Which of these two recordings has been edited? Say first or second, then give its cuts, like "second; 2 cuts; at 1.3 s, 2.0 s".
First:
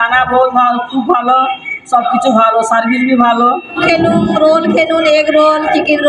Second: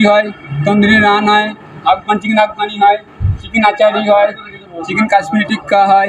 first; 1 cut; at 3.8 s